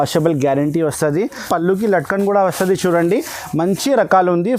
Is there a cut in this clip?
yes; 1 cut; at 1.4 s

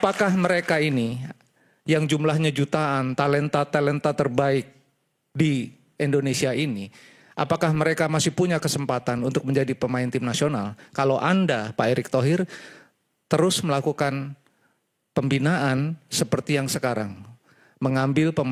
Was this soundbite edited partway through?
no; 0 cuts

